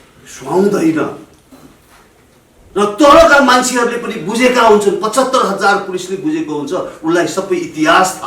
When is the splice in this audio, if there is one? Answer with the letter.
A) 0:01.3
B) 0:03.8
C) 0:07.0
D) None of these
D